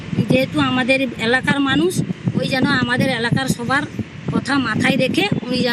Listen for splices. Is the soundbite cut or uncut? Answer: uncut